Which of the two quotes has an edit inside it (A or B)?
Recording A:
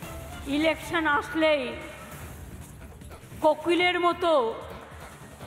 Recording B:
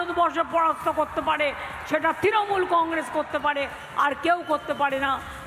A